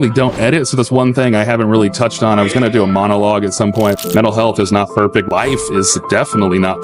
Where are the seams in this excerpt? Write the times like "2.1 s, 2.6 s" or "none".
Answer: 4.0 s, 5.3 s